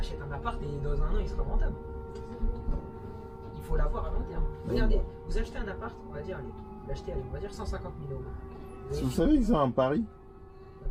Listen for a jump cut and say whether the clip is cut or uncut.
uncut